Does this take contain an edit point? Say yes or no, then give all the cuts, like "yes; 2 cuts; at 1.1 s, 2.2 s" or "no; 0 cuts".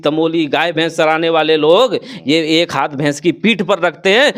no; 0 cuts